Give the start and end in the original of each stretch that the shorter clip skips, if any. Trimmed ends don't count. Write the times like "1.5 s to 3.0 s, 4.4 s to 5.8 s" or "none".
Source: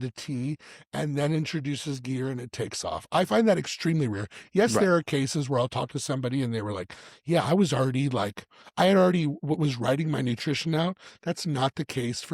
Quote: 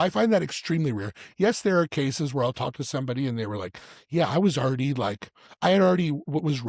none